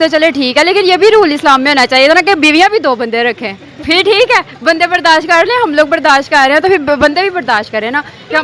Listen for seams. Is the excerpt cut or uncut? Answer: uncut